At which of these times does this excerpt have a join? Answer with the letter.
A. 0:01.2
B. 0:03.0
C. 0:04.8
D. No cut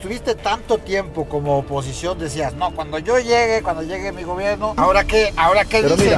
C